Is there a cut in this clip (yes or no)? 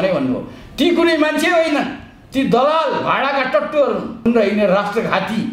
yes